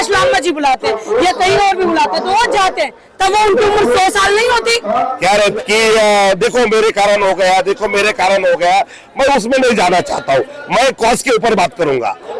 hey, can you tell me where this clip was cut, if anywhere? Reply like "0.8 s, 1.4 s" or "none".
5.5 s